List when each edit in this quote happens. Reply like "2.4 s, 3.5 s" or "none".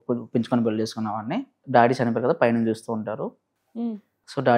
1.6 s